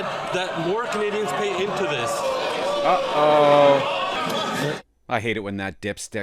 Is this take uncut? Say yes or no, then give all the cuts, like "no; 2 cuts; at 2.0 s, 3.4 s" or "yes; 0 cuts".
no; 1 cut; at 4.2 s